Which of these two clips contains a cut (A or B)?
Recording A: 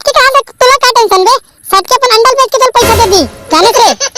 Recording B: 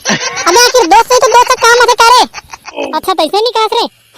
B